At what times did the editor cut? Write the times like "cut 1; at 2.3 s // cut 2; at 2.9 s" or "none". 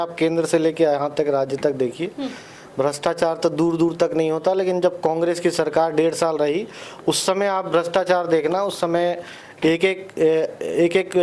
none